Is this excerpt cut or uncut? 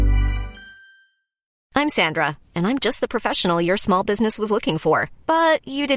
cut